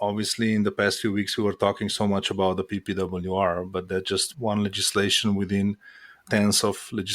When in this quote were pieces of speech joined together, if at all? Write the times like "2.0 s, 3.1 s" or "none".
4.3 s